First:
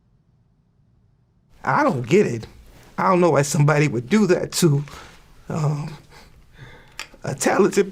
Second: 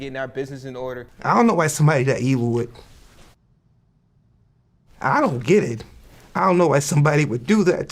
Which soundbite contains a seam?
second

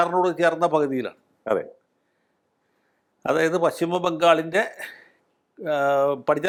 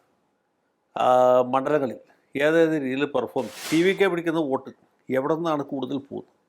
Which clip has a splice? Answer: second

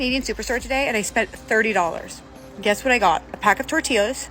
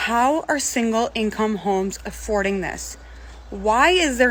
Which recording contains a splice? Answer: first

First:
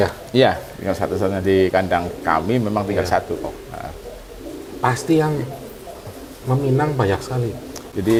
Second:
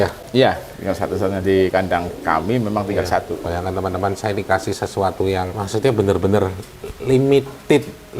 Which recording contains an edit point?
second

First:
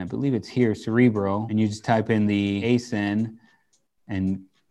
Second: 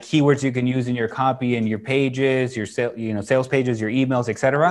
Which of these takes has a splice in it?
first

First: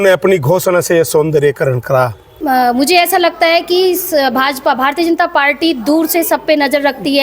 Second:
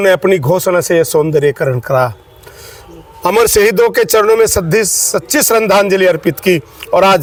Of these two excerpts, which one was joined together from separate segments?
first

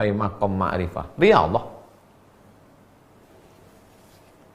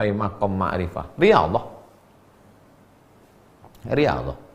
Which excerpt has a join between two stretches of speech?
first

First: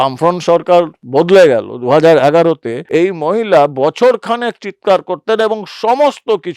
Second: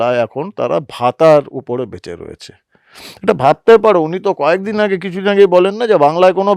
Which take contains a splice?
first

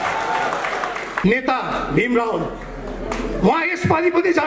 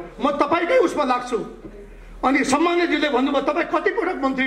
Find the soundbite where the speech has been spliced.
first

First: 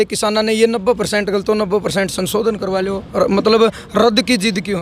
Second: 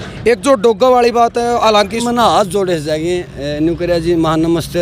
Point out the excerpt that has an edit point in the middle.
second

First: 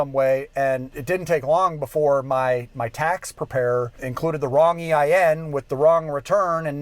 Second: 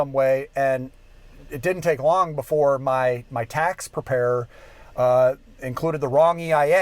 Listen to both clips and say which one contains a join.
first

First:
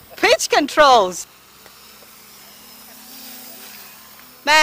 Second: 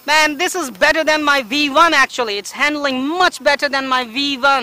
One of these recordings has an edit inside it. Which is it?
first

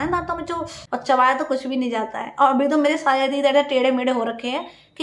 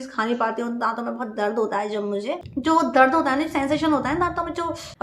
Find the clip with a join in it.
second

